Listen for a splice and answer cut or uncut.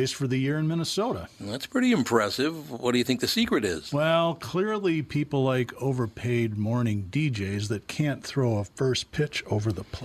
uncut